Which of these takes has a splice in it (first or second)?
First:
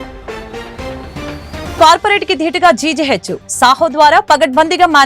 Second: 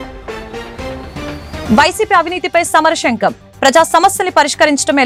first